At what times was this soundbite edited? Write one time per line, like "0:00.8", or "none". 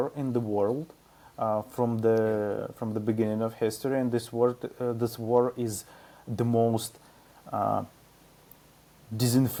none